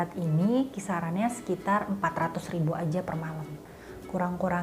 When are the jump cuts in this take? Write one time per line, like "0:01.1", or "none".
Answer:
0:03.7